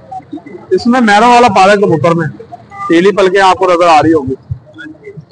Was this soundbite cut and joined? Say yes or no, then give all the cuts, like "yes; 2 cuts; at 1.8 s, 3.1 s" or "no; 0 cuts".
no; 0 cuts